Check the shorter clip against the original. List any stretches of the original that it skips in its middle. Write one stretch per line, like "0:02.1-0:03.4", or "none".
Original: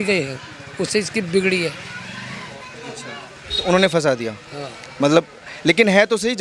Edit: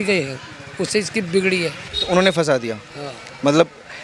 0:01.9-0:03.5